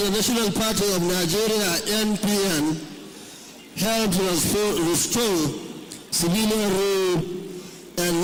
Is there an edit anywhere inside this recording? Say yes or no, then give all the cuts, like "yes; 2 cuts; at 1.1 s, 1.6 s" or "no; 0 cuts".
no; 0 cuts